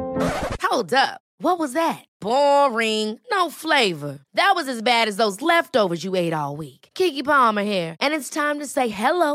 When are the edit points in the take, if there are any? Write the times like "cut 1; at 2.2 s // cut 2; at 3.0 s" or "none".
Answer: none